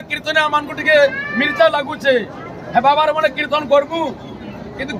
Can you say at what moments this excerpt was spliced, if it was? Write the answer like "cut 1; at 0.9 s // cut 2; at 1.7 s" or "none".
none